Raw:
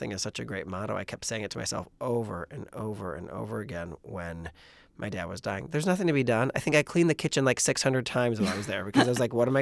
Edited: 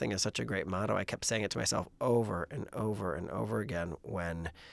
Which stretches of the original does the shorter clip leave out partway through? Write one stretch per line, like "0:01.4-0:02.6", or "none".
none